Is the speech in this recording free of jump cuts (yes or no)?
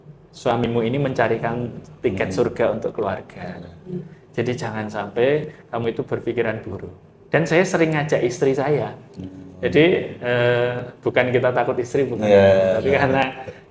yes